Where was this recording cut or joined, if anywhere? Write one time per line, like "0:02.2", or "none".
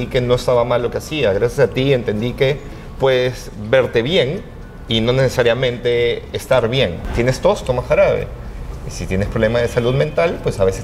0:07.0